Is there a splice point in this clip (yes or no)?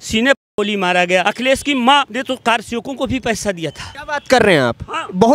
yes